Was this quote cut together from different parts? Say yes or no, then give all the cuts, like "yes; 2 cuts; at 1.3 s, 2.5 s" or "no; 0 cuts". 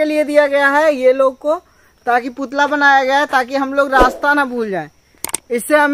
no; 0 cuts